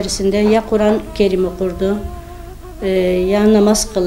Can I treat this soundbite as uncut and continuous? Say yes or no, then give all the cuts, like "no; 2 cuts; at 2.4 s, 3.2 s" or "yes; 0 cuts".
yes; 0 cuts